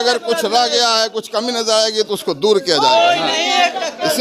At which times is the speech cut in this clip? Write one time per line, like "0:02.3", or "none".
none